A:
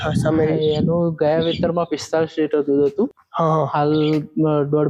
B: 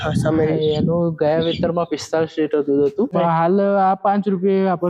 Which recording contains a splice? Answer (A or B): B